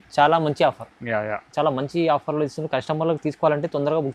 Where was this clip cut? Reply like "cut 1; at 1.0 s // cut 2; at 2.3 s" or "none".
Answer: none